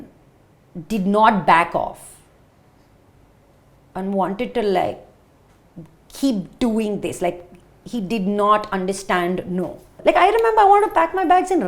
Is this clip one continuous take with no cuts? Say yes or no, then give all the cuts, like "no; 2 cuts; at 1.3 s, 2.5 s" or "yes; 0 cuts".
no; 1 cut; at 9.9 s